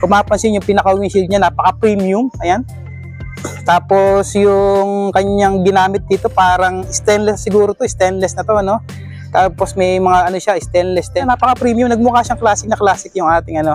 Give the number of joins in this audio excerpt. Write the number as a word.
one